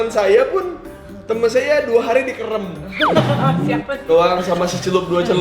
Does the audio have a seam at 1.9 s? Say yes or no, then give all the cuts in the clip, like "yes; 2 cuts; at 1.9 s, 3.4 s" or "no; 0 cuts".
no; 1 cut; at 3.8 s